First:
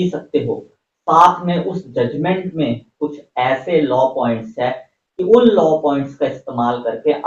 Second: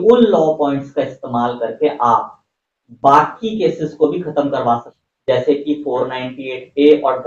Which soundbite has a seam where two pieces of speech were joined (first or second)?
second